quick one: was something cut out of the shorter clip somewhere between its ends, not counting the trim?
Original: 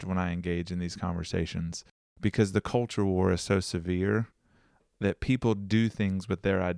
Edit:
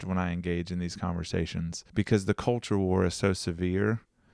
yes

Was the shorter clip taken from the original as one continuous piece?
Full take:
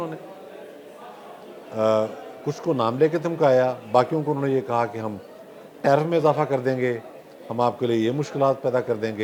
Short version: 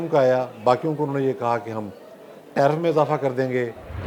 yes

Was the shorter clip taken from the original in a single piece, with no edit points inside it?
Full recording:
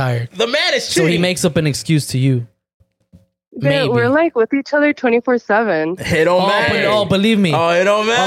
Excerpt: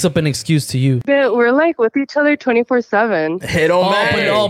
no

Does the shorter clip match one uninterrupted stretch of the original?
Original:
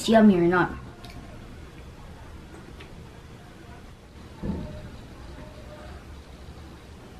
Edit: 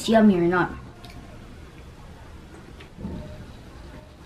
no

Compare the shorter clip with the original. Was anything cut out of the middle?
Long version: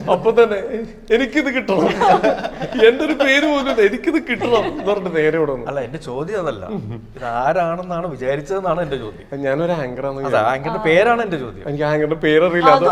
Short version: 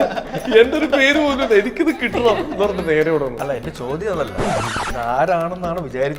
no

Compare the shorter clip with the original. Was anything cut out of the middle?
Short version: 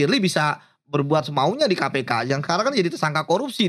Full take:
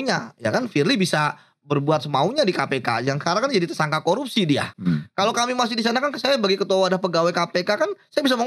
no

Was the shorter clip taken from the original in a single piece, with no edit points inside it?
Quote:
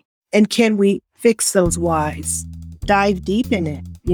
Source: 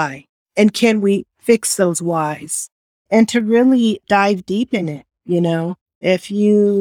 no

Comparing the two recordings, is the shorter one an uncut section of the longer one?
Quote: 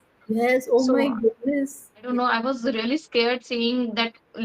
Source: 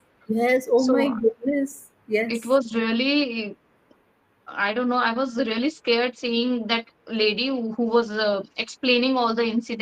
no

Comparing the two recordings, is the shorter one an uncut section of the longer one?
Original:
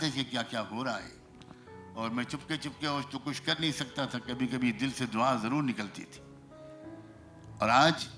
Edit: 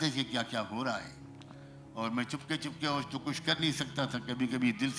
yes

